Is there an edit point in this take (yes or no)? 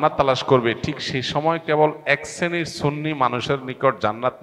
no